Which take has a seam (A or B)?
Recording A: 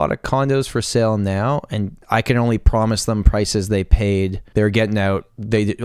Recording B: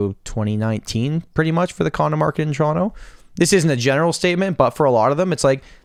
A